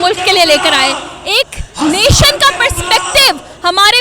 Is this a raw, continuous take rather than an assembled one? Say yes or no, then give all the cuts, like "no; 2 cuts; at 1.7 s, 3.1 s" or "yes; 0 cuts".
yes; 0 cuts